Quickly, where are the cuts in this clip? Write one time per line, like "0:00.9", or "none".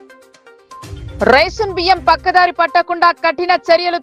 0:00.9